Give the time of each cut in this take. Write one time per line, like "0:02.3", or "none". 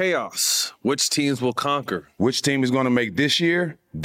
0:02.0